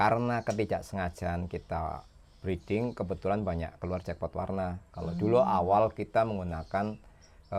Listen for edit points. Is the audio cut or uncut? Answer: uncut